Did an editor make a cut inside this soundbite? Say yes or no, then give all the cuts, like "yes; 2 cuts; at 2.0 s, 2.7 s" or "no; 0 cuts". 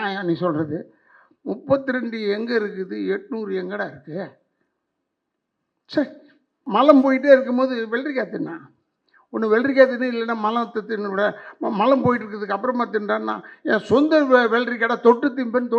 yes; 1 cut; at 6.6 s